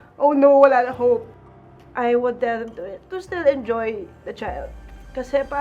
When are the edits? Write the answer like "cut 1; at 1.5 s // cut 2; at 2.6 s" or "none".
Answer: cut 1; at 1.4 s